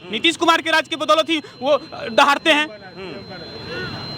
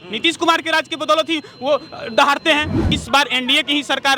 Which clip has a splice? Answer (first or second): second